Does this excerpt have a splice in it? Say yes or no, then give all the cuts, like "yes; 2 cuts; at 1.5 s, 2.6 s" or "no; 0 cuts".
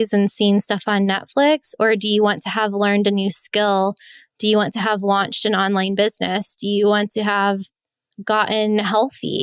no; 0 cuts